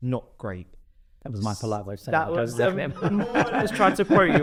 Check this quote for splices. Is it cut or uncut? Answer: uncut